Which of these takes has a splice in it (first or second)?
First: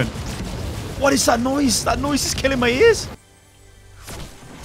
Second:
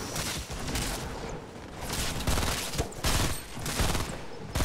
first